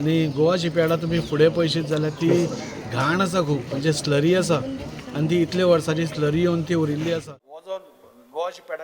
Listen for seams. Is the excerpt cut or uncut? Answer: cut